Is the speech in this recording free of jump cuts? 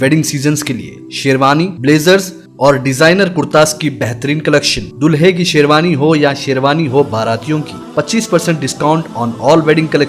yes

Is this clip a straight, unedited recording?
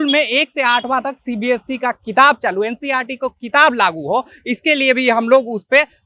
yes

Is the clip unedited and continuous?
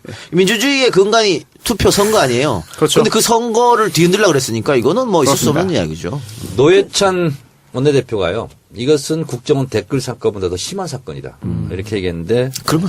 yes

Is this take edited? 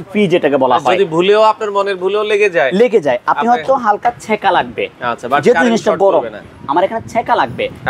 no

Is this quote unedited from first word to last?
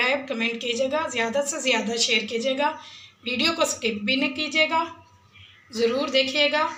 yes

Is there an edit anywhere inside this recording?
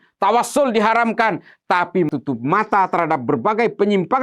yes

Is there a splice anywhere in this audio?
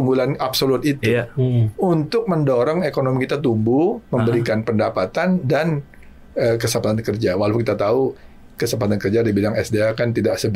no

